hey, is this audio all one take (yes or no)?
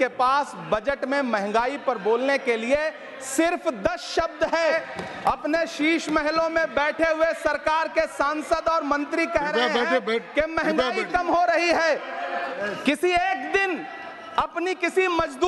no